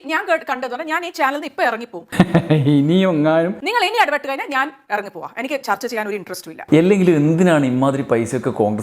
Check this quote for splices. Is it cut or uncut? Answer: cut